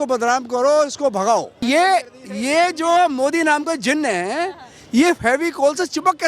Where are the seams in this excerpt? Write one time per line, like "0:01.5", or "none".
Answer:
0:01.6